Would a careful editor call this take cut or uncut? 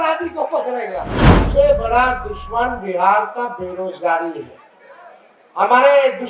cut